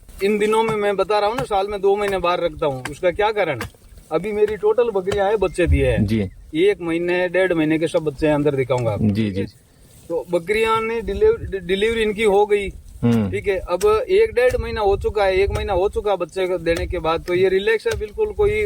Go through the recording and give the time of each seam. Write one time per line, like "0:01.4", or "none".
none